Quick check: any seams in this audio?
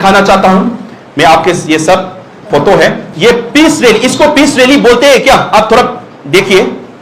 yes; 1 cut; at 3.1 s

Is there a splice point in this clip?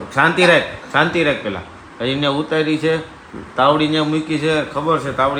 no; 0 cuts

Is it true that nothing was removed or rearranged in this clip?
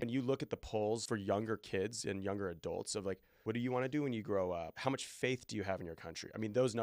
no; 3 cuts; at 1.0 s, 3.3 s, 4.7 s

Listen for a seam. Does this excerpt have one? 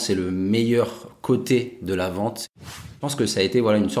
yes; 1 cut; at 3.0 s

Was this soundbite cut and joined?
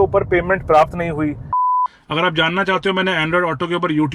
yes; 1 cut; at 1.7 s

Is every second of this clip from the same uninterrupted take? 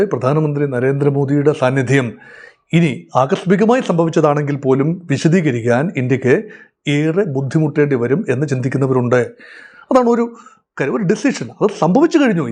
yes; 0 cuts

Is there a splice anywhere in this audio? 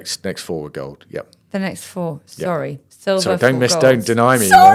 no; 0 cuts

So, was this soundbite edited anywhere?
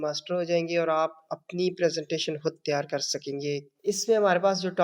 no; 0 cuts

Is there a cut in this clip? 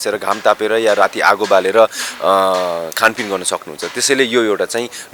no; 0 cuts

